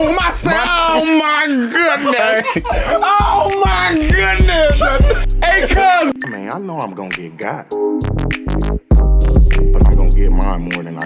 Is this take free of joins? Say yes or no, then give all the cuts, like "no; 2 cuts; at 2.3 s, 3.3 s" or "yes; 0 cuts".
no; 1 cut; at 6.1 s